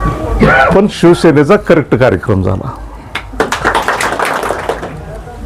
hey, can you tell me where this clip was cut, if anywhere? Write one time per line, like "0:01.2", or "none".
0:04.4